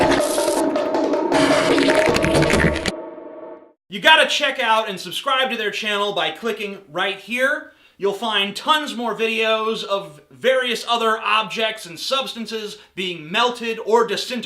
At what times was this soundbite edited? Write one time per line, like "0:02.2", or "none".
0:13.4